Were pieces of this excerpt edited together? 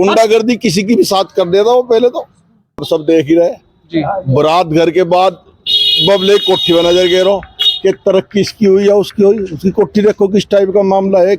yes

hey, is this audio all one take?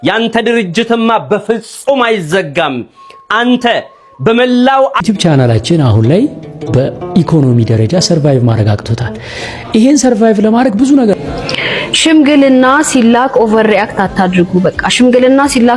no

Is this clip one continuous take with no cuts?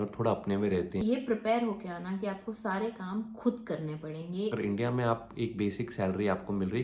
no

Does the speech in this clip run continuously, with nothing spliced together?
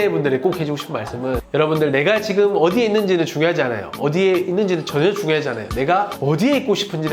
yes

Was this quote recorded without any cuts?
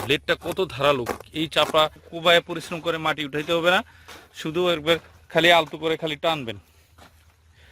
no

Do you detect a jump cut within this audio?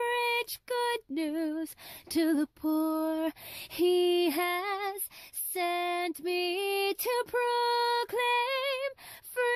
no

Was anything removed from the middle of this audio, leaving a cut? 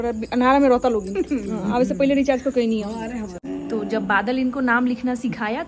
yes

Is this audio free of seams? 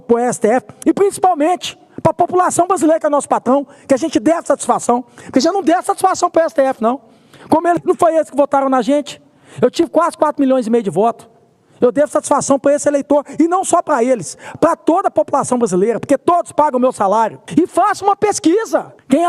yes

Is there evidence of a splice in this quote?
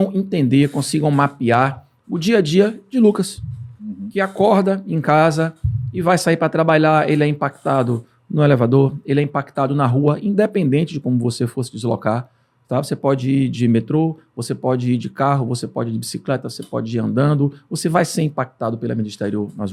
no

